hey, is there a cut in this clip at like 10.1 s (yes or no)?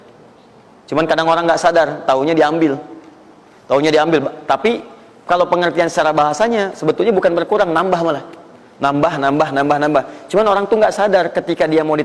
no